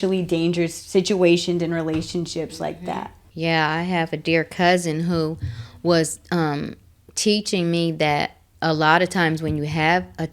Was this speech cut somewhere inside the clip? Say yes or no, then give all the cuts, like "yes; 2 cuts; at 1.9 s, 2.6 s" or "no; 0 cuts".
yes; 1 cut; at 2.7 s